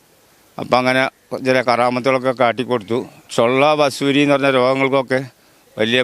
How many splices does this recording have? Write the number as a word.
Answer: one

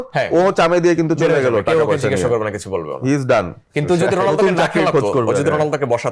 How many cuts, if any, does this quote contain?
zero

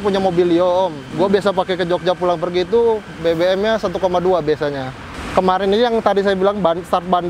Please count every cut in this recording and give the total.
two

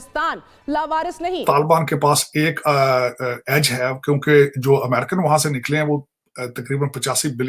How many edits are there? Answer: one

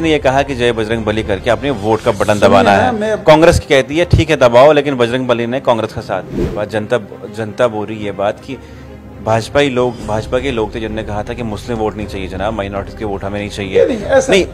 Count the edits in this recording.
one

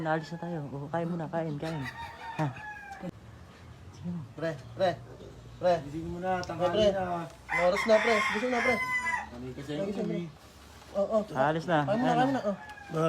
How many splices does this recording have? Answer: one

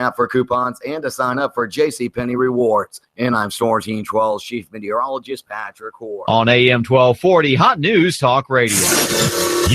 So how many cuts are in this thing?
one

